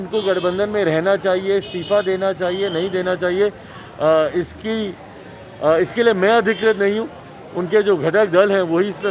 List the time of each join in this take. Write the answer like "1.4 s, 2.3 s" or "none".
none